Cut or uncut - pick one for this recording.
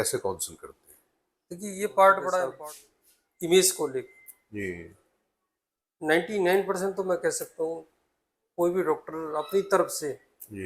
cut